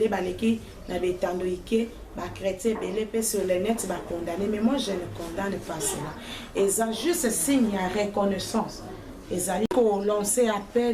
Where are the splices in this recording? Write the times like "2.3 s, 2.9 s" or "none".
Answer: 9.7 s